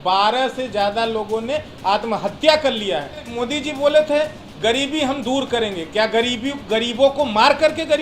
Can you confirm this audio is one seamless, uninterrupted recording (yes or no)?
no